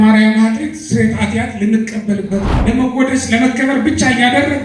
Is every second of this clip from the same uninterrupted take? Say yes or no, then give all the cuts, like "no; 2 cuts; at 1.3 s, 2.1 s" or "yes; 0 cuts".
no; 1 cut; at 2.5 s